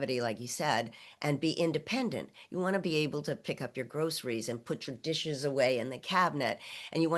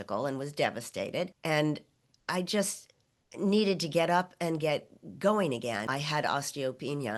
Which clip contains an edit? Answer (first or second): second